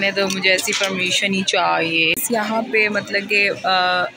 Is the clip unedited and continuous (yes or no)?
no